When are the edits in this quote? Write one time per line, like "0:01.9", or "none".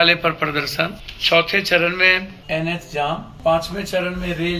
0:01.1
0:02.3
0:03.3

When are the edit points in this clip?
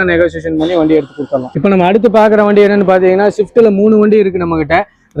none

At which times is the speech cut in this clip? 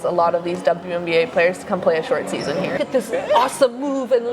0:02.8

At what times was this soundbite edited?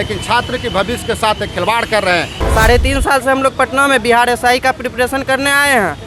0:02.4

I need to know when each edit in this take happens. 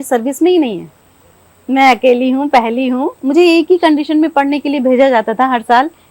0:03.2

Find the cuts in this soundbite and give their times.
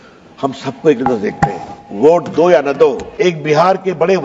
0:03.1

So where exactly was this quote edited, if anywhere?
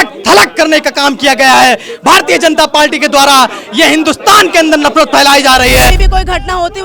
0:05.9

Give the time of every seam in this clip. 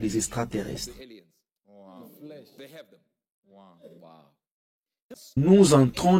0:05.2

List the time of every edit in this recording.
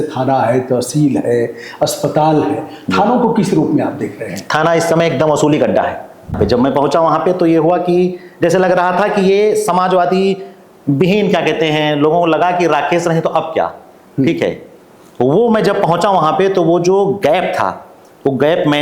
0:06.4

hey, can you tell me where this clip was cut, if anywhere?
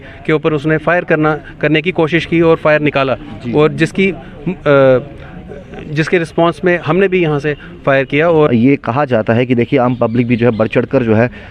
0:08.5

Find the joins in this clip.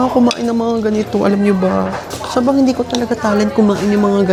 none

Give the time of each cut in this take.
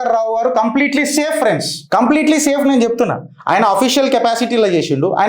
0:01.7

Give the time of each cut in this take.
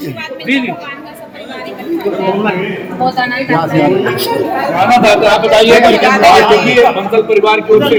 none

